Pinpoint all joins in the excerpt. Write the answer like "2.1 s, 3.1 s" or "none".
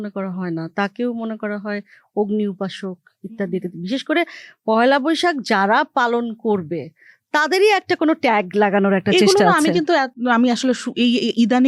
none